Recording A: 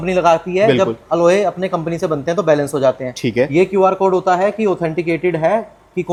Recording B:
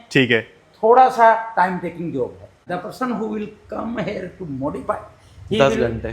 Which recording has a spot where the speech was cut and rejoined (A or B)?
B